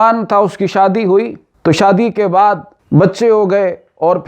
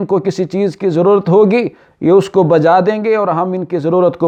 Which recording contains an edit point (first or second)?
first